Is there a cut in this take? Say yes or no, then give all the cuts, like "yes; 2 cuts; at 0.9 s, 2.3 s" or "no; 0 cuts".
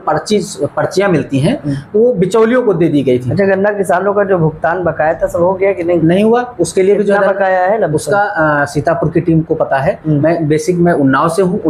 no; 0 cuts